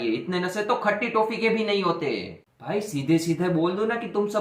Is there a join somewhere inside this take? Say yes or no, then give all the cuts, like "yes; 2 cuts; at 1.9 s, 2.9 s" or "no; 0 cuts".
yes; 1 cut; at 2.6 s